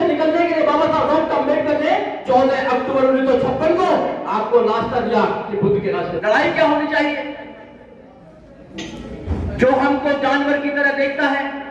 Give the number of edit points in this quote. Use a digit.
1